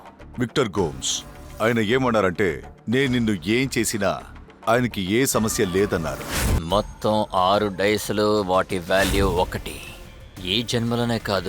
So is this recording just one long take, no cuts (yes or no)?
no